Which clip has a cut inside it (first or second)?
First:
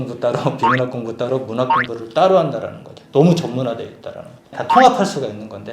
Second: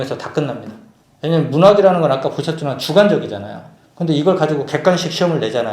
first